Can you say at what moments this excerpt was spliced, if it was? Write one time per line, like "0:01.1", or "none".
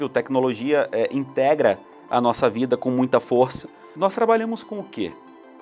0:03.9